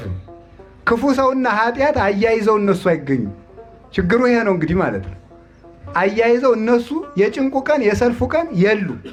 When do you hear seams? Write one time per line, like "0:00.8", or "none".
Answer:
none